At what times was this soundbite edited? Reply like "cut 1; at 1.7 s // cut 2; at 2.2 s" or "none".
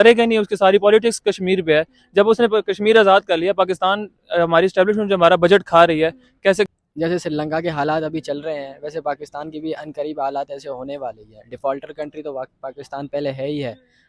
cut 1; at 6.7 s